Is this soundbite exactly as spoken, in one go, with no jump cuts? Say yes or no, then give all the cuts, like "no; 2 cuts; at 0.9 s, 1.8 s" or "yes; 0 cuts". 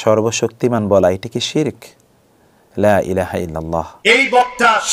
no; 1 cut; at 3.9 s